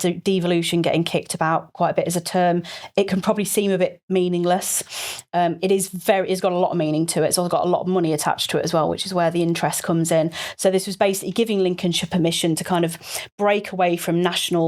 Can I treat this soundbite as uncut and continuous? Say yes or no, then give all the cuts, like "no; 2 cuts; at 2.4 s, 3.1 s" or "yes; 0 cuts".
yes; 0 cuts